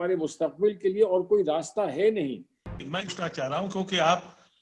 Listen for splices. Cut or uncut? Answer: cut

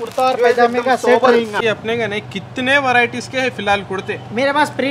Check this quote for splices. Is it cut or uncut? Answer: cut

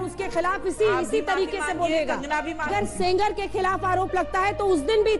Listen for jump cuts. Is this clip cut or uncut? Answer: cut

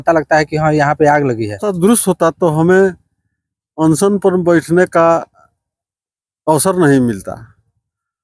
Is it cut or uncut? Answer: cut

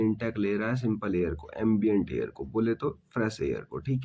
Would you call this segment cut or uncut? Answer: uncut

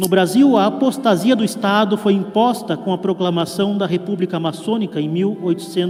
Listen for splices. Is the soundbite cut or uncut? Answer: uncut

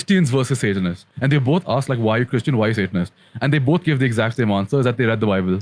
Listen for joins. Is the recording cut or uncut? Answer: cut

